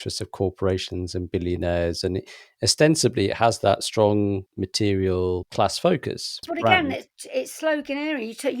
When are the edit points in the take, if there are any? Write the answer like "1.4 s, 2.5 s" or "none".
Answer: 4.5 s, 5.5 s, 6.5 s